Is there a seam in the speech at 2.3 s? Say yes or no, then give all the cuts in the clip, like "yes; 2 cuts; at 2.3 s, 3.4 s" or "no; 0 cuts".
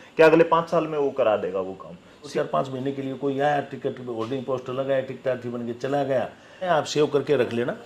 yes; 2 cuts; at 2.3 s, 6.7 s